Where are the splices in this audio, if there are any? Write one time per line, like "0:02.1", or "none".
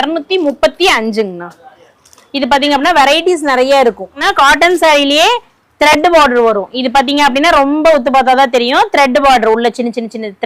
0:04.2

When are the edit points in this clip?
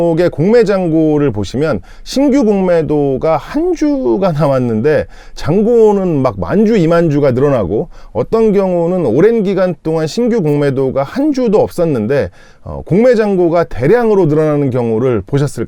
none

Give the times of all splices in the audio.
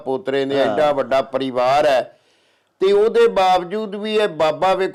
none

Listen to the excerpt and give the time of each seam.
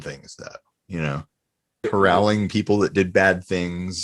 0:01.9

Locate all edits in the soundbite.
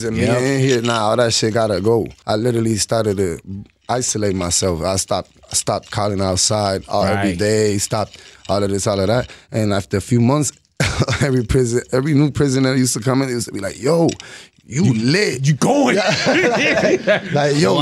0:02.2

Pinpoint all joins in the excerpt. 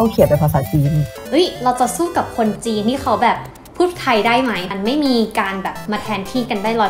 0:01.1
0:04.7

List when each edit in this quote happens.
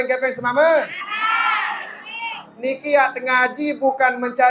0:02.5

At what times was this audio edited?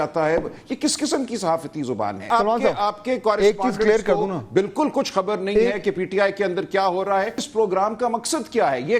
0:02.3
0:07.4

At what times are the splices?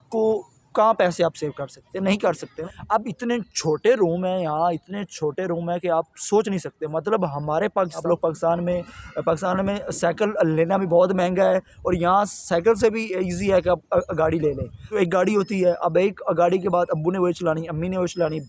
0:02.5
0:08.0
0:14.7

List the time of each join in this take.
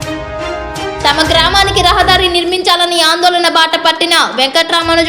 0:01.0

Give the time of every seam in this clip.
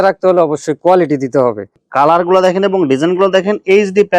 0:01.7

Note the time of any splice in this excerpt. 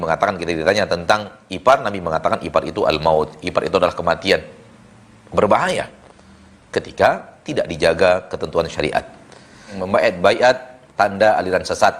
0:09.8

